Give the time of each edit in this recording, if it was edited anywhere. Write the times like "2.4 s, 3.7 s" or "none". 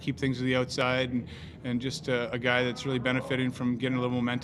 none